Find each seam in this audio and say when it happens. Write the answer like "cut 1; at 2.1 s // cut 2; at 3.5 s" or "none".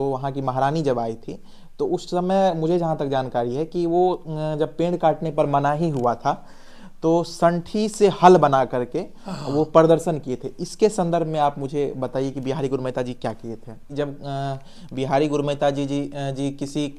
cut 1; at 13.9 s